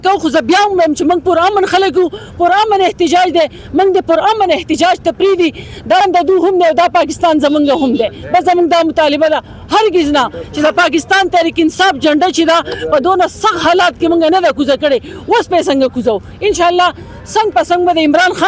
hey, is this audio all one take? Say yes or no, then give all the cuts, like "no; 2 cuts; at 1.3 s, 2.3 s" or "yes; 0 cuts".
yes; 0 cuts